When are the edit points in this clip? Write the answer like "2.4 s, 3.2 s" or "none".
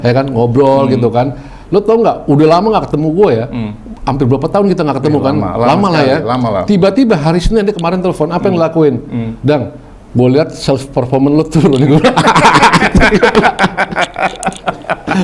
none